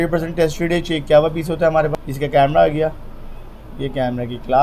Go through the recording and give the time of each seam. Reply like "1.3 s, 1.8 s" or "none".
1.9 s